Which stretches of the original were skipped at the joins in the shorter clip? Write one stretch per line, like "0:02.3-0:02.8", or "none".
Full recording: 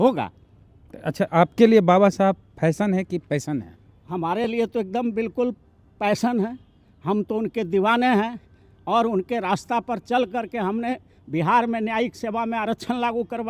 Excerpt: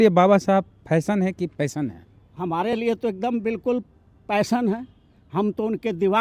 none